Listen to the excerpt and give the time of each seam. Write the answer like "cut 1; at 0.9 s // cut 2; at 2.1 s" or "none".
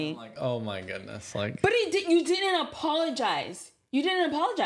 none